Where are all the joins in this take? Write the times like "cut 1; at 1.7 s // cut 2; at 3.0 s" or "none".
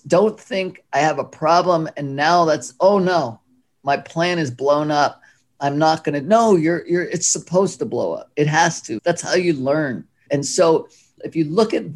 cut 1; at 8.9 s // cut 2; at 10.2 s // cut 3; at 11.1 s

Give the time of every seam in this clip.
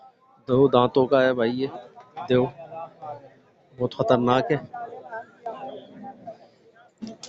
none

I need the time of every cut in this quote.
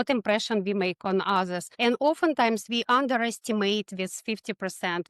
cut 1; at 1.6 s

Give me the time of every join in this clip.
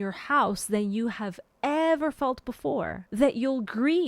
cut 1; at 3.0 s

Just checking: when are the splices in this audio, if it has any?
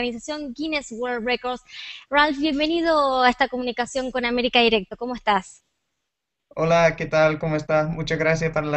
none

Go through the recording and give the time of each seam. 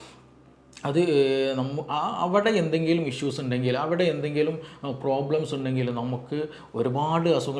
none

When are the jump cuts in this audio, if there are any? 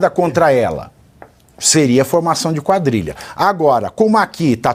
none

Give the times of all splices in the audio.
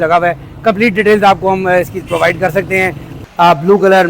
cut 1; at 3.1 s

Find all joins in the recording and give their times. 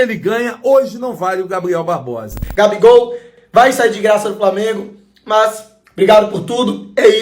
cut 1; at 2.4 s

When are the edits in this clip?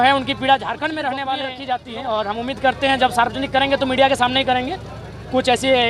cut 1; at 1.5 s

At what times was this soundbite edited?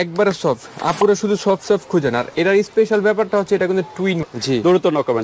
cut 1; at 4.2 s

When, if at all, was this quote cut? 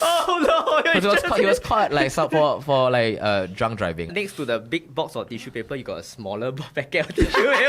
cut 1; at 4.1 s

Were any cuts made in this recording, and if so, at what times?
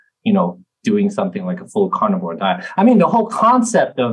none

